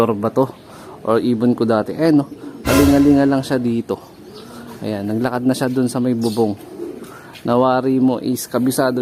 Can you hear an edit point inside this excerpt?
no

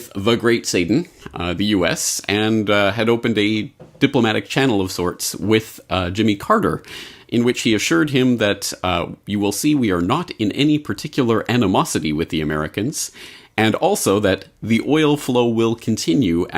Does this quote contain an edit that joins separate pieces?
yes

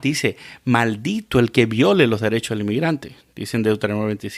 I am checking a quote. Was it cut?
no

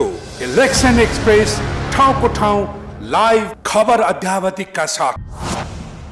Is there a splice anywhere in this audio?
yes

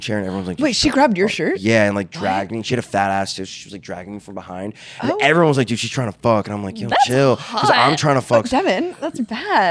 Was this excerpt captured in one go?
yes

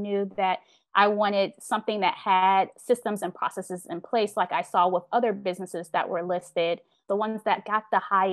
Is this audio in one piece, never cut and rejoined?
no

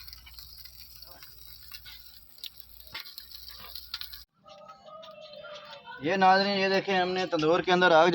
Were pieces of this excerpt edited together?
yes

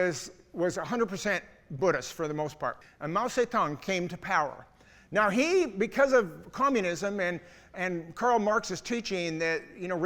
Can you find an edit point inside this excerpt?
yes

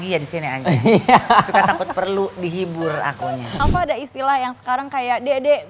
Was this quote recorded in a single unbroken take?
no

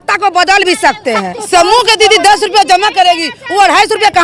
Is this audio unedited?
no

